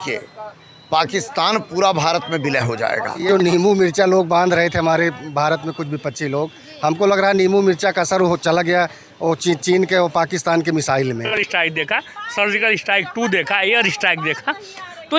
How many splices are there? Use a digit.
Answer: 2